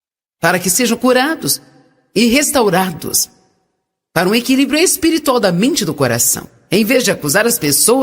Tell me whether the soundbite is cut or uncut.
uncut